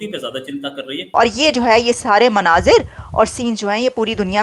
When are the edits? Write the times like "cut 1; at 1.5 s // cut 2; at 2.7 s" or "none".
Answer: cut 1; at 1.0 s